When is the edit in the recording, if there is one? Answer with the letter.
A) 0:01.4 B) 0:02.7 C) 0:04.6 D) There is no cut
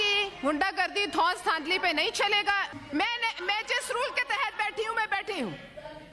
B